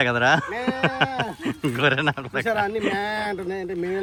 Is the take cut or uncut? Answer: uncut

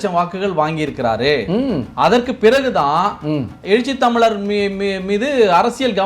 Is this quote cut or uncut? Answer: uncut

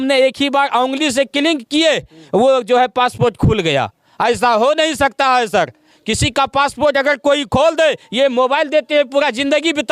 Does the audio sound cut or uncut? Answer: uncut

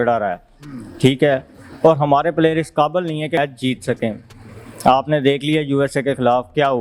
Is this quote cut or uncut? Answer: uncut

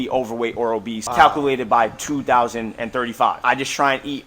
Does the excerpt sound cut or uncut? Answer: cut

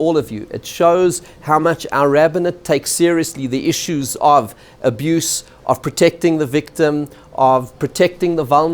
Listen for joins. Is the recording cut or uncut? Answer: uncut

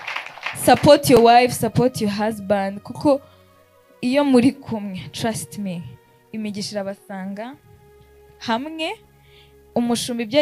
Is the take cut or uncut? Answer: uncut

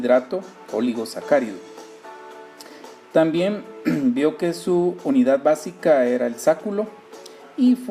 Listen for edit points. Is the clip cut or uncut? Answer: cut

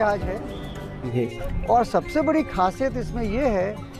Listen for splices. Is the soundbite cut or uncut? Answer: cut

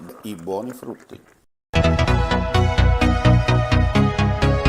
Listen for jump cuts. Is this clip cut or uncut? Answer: uncut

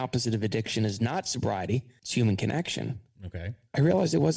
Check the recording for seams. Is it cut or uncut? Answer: uncut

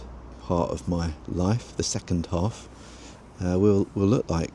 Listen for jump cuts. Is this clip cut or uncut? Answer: uncut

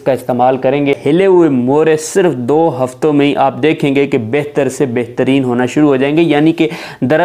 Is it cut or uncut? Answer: cut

